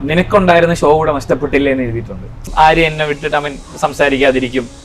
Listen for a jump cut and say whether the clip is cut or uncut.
cut